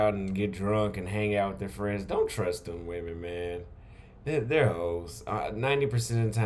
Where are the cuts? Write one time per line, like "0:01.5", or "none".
none

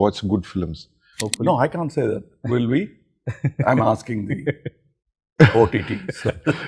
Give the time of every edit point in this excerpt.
0:01.2

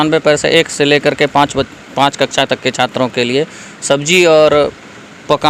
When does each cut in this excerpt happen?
none

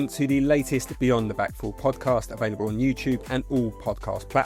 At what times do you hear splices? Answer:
none

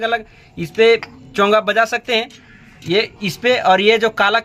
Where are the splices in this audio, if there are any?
none

